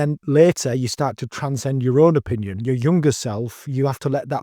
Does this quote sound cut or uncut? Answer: uncut